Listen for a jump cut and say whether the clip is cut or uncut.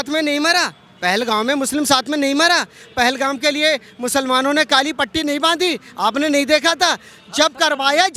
uncut